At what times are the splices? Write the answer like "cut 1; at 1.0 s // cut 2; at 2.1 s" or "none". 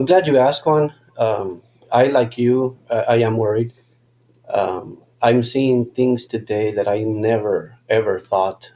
none